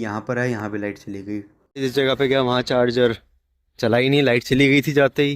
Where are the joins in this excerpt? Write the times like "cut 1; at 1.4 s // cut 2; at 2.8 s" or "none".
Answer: cut 1; at 1.6 s